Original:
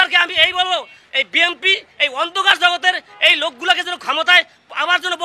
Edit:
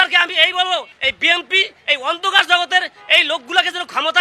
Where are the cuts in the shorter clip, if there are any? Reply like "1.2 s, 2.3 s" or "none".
0.9 s